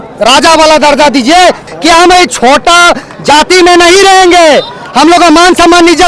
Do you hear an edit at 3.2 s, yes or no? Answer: no